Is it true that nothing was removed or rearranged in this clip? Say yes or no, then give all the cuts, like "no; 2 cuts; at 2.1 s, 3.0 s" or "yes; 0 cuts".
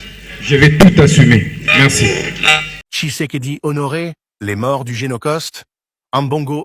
no; 1 cut; at 2.8 s